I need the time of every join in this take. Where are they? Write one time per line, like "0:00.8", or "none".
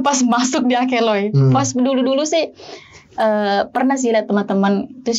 none